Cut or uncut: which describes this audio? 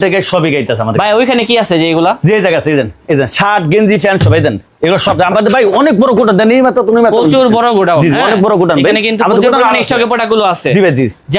uncut